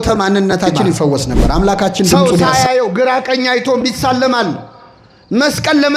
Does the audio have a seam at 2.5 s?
yes; 1 cut; at 2.5 s

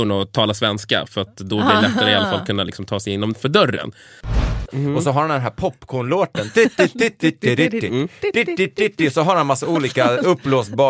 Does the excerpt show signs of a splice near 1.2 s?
no; 1 cut; at 4.3 s

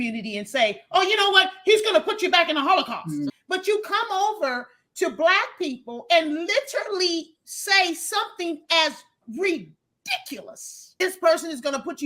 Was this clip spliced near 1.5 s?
no; 2 cuts; at 3.3 s, 11.0 s

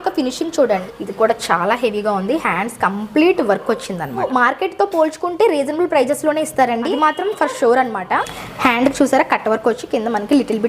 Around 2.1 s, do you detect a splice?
no; 4 cuts; at 0.8 s, 4.3 s, 6.9 s, 8.4 s

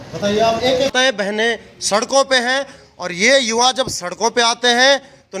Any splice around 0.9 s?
yes; 1 cut; at 0.9 s

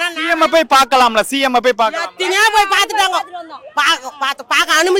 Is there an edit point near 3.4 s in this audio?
no; 0 cuts

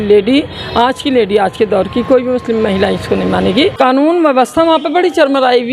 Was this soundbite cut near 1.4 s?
no; 1 cut; at 3.7 s

